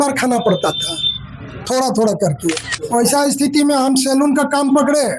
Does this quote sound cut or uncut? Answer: cut